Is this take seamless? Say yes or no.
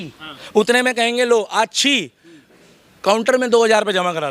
yes